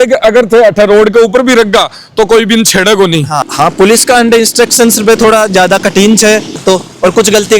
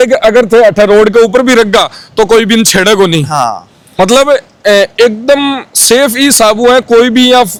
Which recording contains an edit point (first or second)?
first